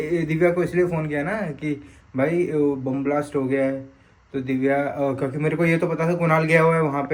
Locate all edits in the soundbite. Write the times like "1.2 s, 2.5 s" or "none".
none